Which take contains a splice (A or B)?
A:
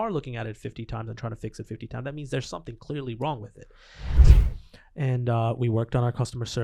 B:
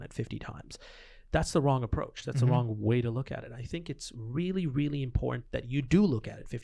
A